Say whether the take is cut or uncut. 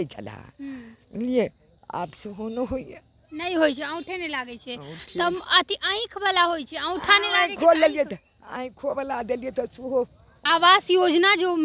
cut